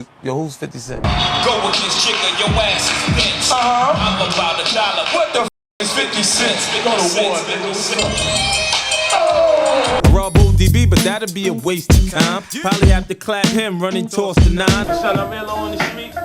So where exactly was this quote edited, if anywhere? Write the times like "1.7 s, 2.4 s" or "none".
1.0 s, 10.0 s, 14.9 s